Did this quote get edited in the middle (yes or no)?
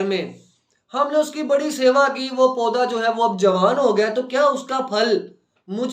no